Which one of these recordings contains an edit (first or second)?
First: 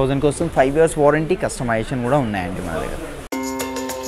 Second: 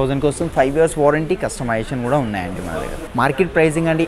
second